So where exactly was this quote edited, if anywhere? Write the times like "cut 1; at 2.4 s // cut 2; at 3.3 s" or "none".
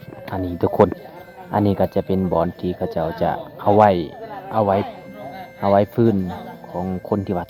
none